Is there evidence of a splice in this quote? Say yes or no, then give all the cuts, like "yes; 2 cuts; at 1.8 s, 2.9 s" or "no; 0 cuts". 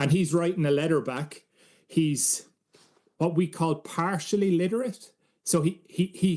no; 0 cuts